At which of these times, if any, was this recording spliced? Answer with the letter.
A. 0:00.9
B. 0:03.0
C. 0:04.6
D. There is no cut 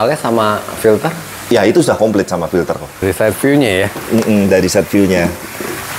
B